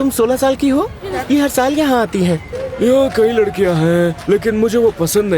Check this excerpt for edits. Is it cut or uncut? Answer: cut